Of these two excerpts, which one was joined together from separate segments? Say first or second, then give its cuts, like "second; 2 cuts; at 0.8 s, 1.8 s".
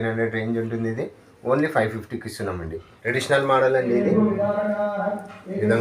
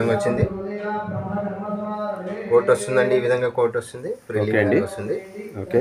first; 1 cut; at 2.9 s